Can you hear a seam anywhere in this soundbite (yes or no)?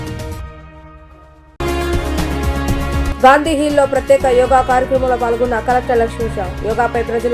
no